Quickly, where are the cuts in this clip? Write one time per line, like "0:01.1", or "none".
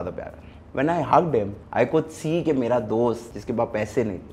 0:01.6
0:03.3